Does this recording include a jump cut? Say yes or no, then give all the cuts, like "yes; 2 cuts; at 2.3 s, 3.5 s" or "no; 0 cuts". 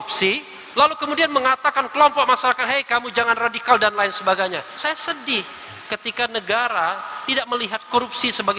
yes; 1 cut; at 4.7 s